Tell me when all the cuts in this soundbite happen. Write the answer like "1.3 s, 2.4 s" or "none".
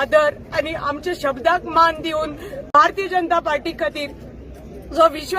2.7 s